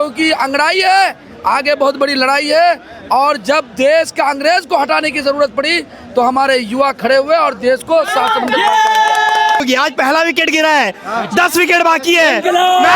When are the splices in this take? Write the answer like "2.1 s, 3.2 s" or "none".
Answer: 9.6 s